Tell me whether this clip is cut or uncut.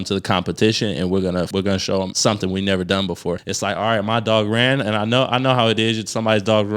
cut